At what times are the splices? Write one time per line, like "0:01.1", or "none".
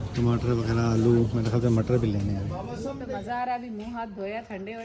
0:02.5